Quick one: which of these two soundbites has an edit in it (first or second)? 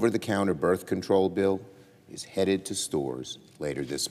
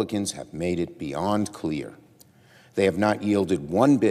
first